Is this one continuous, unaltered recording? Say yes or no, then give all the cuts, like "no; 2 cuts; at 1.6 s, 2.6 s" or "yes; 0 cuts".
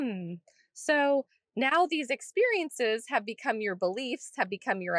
yes; 0 cuts